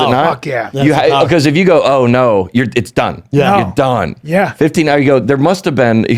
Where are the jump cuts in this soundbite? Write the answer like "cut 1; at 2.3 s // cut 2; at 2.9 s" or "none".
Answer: none

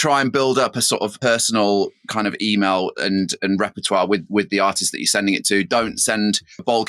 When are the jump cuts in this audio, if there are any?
cut 1; at 1.1 s

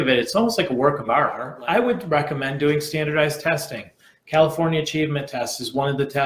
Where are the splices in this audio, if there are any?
cut 1; at 1.5 s

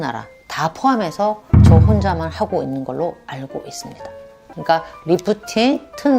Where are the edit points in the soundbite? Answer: cut 1; at 4.5 s

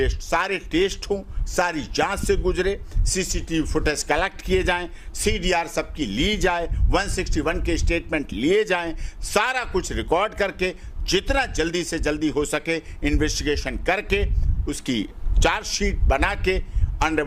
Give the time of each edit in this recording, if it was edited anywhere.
none

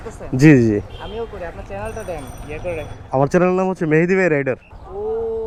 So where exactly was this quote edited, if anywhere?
none

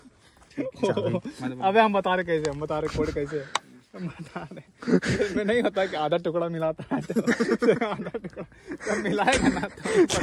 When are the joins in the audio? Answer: none

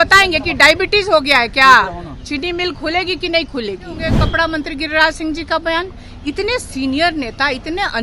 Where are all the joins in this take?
cut 1; at 4.2 s

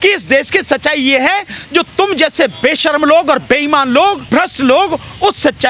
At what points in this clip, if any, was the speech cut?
cut 1; at 4.2 s

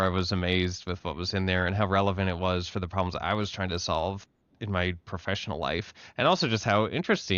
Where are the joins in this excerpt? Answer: none

